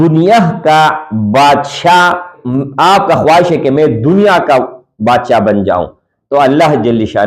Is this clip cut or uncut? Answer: cut